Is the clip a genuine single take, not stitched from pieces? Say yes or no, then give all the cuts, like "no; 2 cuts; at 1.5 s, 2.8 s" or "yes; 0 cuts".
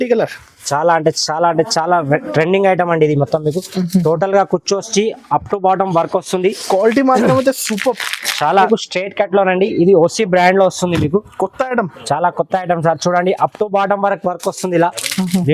no; 1 cut; at 8.7 s